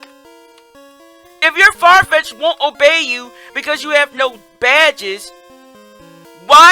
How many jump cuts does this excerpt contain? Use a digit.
0